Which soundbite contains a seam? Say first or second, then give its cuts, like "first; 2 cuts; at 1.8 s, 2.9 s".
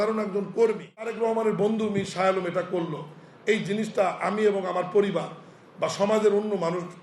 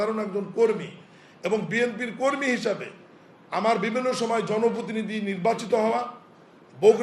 first; 1 cut; at 1.1 s